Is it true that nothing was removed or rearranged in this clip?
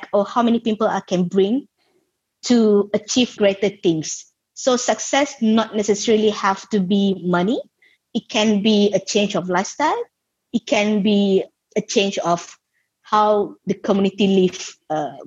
no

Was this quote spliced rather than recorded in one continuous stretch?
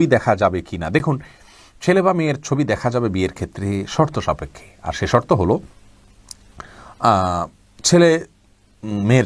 no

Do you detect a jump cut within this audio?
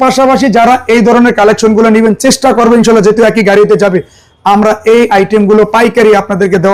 no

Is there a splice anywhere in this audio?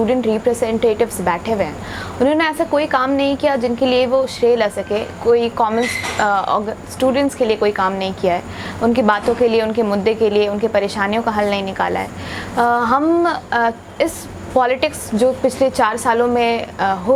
no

